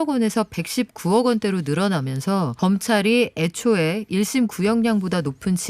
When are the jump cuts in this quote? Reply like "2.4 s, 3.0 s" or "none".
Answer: 2.5 s